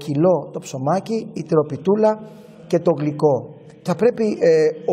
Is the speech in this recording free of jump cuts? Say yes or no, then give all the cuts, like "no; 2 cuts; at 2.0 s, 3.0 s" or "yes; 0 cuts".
no; 1 cut; at 3.8 s